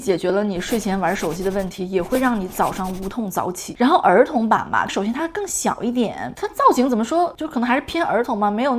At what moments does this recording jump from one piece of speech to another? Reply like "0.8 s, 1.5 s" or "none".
none